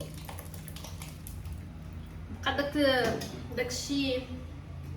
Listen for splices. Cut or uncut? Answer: uncut